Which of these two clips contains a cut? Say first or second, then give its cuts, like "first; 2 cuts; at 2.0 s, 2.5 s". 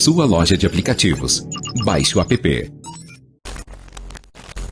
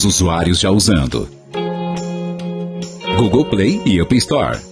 first; 1 cut; at 3.3 s